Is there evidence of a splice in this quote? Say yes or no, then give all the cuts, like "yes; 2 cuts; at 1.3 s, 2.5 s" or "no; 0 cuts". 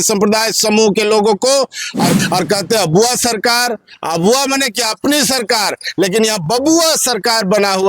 yes; 1 cut; at 2.2 s